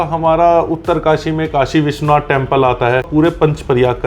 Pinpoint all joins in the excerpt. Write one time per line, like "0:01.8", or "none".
0:03.1